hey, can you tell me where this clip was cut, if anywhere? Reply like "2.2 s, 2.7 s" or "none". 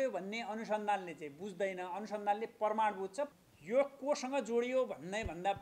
3.3 s